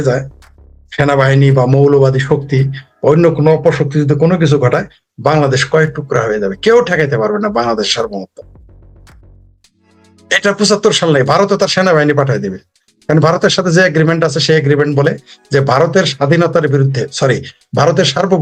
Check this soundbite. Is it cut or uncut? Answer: uncut